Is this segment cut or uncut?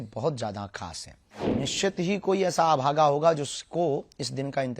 cut